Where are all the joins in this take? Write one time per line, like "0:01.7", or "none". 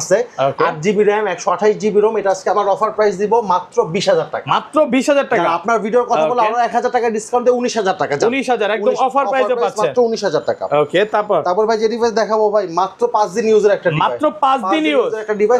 none